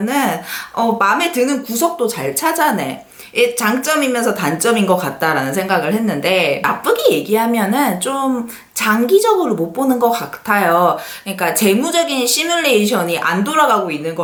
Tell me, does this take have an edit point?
no; 0 cuts

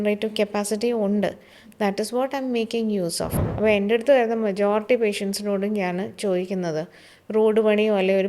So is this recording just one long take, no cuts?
no; 1 cut; at 3.4 s

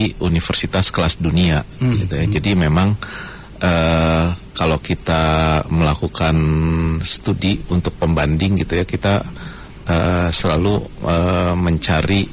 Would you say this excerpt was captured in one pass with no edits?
yes; 0 cuts

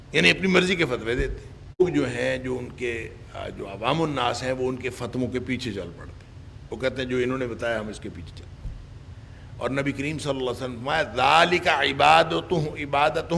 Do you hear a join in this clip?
yes; 1 cut; at 1.8 s

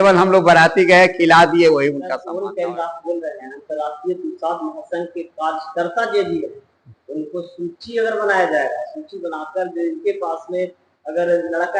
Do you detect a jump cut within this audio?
yes; 1 cut; at 2.2 s

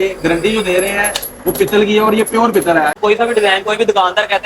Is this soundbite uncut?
no; 1 cut; at 3.0 s

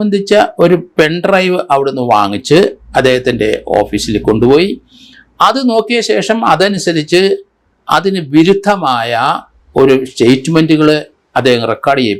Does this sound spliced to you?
no; 0 cuts

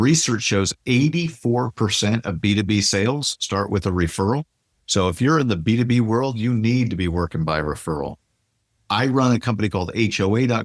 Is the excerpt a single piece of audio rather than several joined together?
yes; 0 cuts

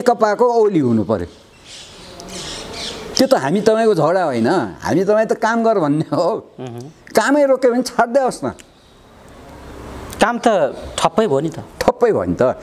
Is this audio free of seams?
yes; 0 cuts

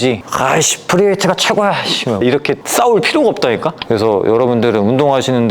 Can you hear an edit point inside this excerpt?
yes; 2 cuts; at 2.2 s, 3.8 s

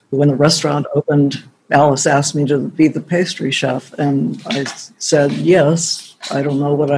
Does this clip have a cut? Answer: yes; 2 cuts; at 1.5 s, 2.7 s

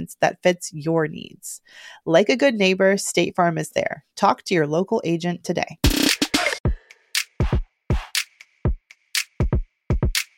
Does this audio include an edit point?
yes; 1 cut; at 6.6 s

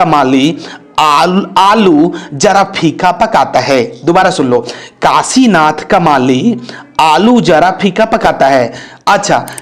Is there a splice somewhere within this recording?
no; 0 cuts

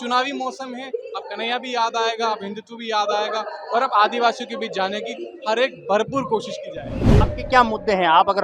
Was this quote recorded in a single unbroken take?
no; 1 cut; at 7.2 s

